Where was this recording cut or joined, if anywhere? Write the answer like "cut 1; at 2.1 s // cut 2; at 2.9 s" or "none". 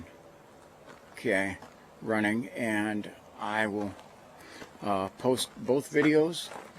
cut 1; at 4.8 s